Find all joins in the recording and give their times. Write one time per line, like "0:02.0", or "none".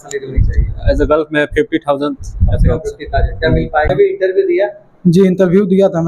0:03.9